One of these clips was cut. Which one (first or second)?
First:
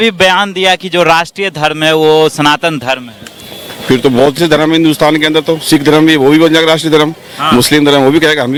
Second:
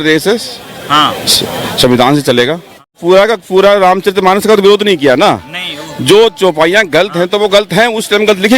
second